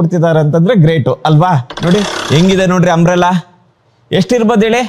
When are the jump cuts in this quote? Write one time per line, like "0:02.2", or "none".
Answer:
0:02.2

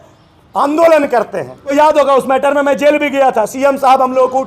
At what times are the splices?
0:01.7

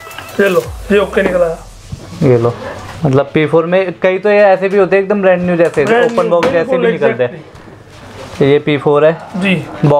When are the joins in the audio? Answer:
none

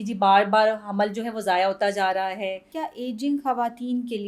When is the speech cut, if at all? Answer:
0:02.7

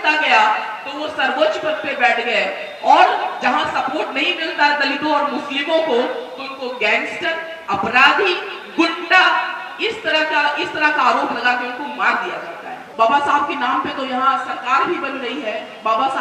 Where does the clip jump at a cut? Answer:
0:12.9

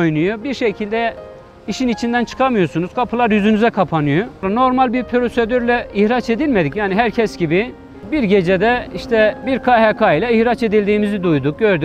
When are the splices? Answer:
0:04.4
0:08.1
0:09.4

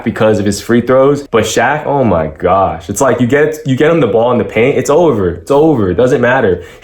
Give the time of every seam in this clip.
0:01.2

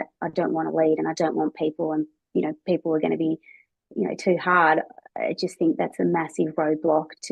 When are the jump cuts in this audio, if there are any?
none

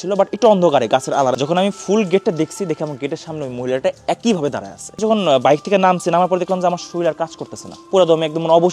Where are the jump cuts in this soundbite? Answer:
0:01.4
0:05.0

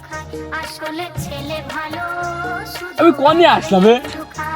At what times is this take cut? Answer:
0:01.0

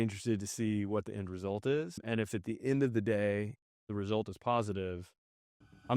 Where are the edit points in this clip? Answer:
0:02.0

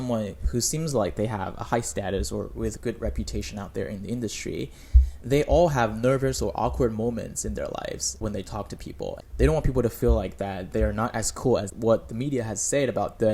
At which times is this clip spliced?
none

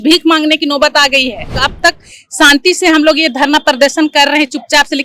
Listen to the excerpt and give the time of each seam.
0:01.7

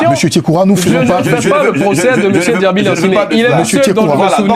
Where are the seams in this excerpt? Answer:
none

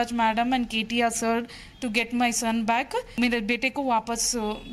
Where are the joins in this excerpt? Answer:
0:03.2

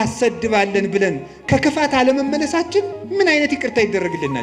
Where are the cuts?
none

